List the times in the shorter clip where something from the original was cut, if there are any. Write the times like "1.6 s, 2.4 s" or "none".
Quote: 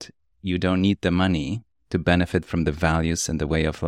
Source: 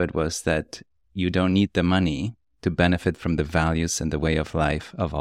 none